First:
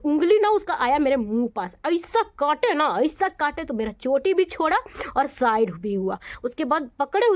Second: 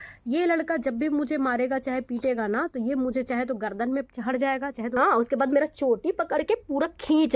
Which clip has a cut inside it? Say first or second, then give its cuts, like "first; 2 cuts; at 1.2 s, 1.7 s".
second; 1 cut; at 5.0 s